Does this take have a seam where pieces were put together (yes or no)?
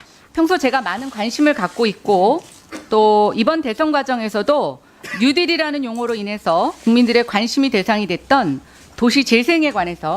yes